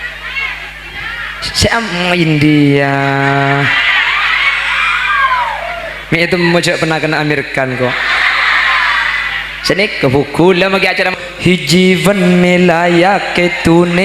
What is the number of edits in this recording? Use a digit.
1